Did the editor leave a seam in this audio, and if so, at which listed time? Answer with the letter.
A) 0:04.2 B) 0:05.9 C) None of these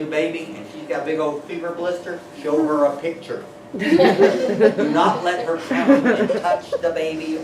B